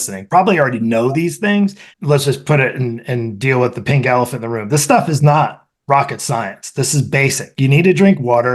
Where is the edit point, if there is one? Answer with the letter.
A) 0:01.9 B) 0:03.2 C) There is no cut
A